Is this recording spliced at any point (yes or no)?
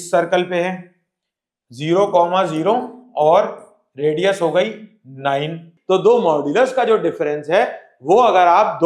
yes